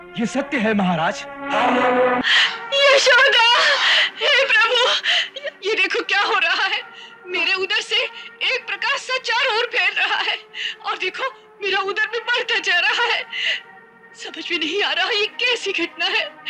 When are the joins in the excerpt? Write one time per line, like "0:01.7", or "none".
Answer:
0:02.2

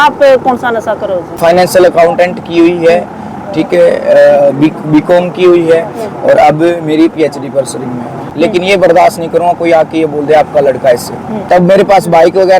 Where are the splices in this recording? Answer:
0:01.4
0:08.2
0:11.3

